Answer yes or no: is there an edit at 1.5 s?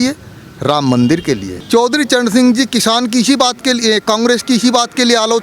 yes